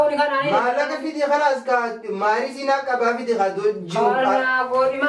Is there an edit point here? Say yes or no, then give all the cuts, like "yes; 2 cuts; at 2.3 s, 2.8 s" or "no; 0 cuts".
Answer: no; 0 cuts